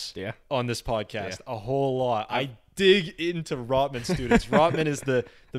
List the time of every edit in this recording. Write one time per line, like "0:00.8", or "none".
none